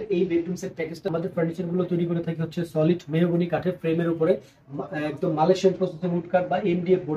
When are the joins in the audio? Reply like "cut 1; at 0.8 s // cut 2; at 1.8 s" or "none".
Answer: cut 1; at 1.1 s